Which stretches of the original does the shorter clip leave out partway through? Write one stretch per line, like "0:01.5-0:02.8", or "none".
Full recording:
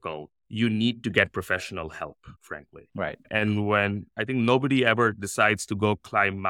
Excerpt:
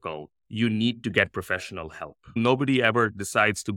0:02.4-0:04.4